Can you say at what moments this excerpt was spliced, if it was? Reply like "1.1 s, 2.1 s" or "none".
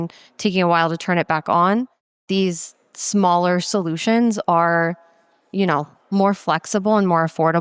2.2 s